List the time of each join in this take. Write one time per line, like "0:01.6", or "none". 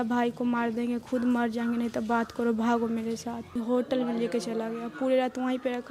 0:03.5